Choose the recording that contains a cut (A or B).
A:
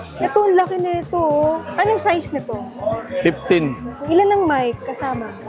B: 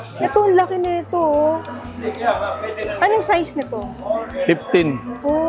A